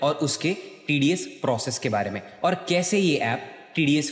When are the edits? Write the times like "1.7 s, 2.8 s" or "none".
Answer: none